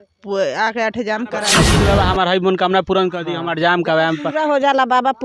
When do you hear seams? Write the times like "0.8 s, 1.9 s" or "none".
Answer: 1.7 s